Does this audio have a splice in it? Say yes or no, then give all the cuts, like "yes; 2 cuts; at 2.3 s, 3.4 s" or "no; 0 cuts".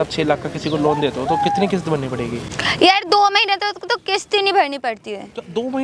no; 0 cuts